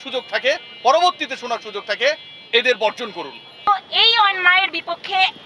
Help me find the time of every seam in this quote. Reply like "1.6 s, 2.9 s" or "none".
3.7 s